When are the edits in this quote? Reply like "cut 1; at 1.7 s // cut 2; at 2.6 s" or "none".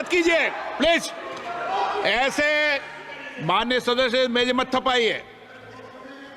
none